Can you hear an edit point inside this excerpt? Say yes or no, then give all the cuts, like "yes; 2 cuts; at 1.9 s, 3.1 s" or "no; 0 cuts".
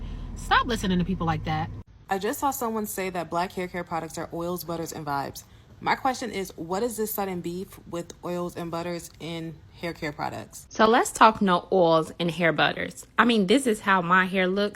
yes; 2 cuts; at 2.0 s, 10.6 s